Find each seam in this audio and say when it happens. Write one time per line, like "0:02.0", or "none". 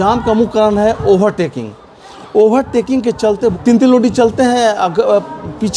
0:03.6